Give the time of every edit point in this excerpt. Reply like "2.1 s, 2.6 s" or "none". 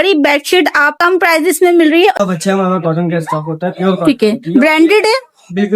0.9 s, 2.2 s

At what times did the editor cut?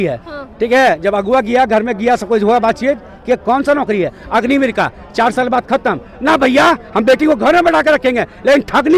none

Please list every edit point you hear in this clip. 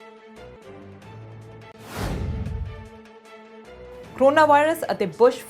1.4 s, 4.2 s

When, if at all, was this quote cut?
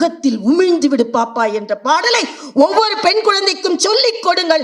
none

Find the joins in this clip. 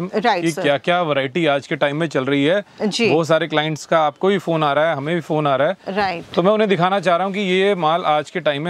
none

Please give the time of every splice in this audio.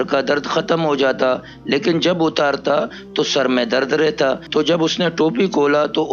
4.4 s

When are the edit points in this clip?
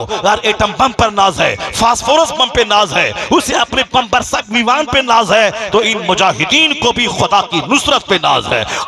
none

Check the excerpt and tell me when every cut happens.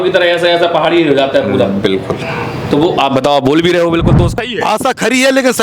4.3 s

